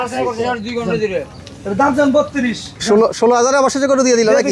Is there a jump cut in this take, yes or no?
no